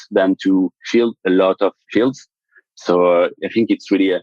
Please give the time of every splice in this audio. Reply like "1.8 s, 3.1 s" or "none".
2.3 s, 3.3 s